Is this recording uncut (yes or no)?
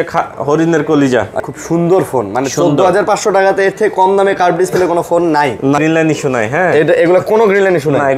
no